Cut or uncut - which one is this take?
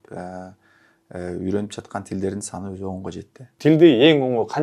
cut